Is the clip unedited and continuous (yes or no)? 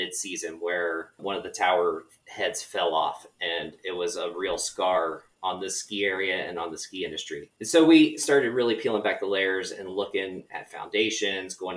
no